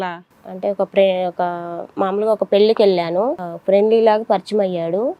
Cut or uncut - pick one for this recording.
cut